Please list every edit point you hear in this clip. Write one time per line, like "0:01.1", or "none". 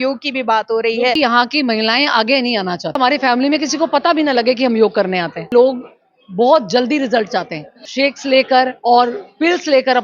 0:01.2
0:03.0
0:05.5
0:07.9